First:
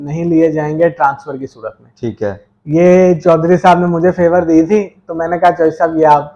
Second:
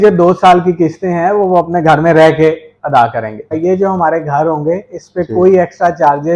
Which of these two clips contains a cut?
second; 1 cut; at 3.5 s

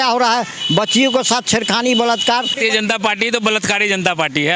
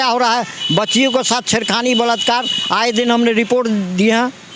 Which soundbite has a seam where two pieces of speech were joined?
first; 1 cut; at 2.5 s

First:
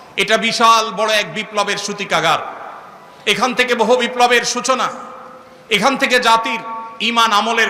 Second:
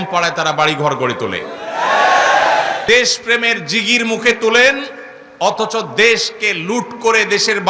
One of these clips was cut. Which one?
second; 1 cut; at 2.8 s

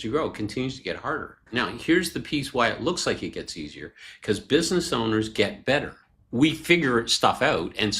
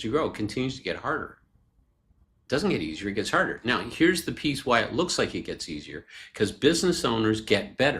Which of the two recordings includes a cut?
first; 1 cut; at 1.4 s

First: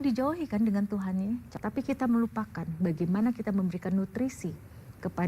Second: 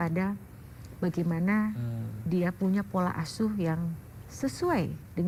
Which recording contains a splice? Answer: first; 1 cut; at 1.5 s

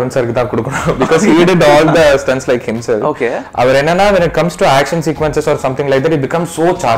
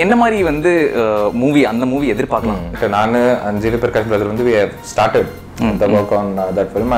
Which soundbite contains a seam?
second; 1 cut; at 2.8 s

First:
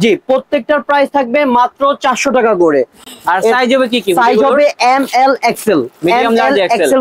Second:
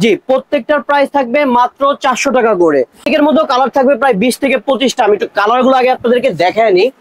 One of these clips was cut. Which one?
second; 1 cut; at 3.1 s

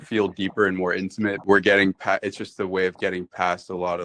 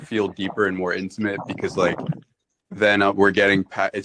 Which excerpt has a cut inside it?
first; 1 cut; at 1.4 s

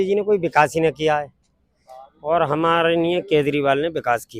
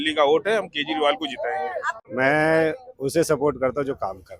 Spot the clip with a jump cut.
second; 1 cut; at 1.9 s

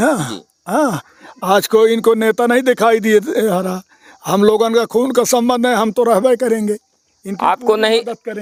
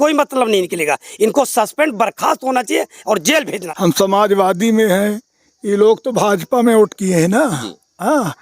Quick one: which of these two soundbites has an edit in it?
second; 1 cut; at 3.6 s

